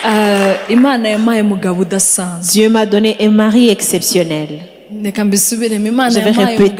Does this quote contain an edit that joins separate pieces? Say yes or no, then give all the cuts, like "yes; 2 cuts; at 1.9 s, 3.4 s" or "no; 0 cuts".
no; 0 cuts